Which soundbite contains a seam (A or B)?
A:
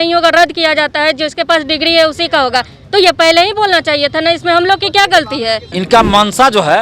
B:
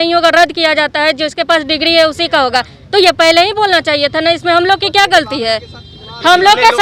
A